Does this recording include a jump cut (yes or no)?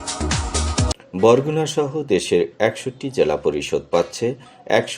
yes